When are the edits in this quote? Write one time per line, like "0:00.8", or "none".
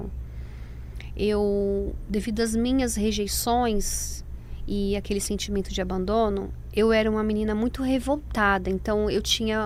none